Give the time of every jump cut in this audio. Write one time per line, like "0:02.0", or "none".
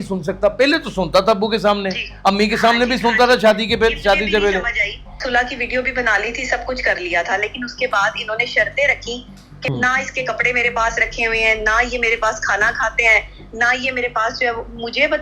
0:05.2
0:09.7